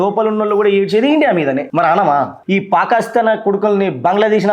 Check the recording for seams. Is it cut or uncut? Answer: cut